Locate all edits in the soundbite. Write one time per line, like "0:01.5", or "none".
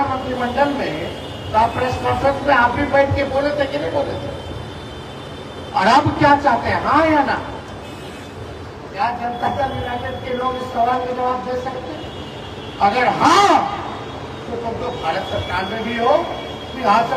none